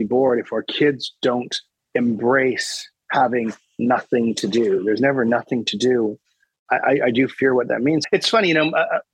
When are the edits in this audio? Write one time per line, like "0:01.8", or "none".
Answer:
0:08.0